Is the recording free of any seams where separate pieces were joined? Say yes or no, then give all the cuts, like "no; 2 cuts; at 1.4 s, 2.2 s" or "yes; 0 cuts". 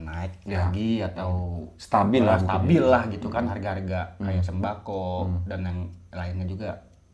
yes; 0 cuts